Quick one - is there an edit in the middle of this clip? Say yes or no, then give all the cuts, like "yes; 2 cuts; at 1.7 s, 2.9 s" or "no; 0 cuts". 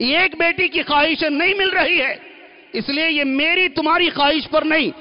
no; 0 cuts